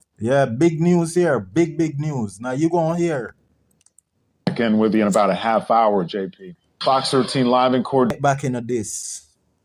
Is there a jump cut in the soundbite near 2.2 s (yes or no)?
no